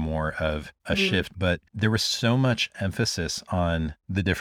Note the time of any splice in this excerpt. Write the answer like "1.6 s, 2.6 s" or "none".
1.3 s